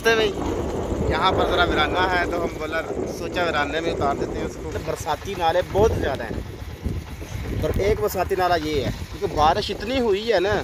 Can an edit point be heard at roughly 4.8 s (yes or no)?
yes